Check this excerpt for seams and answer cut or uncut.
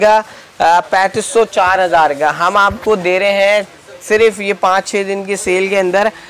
uncut